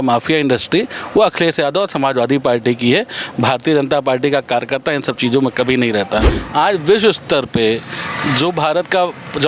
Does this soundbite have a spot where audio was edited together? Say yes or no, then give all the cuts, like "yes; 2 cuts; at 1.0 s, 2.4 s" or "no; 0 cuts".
yes; 1 cut; at 6.4 s